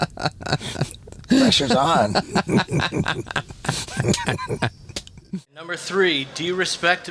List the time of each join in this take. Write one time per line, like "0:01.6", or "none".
0:05.2